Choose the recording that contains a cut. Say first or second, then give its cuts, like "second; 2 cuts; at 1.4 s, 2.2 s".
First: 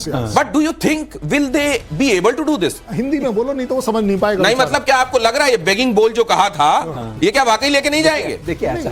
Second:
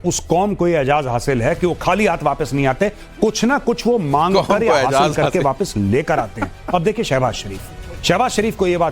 second; 1 cut; at 6.5 s